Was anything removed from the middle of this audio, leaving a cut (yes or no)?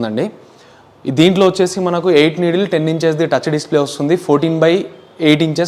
no